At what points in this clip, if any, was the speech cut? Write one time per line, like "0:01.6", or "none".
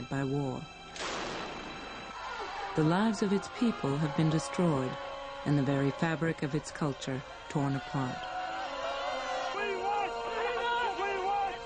0:09.0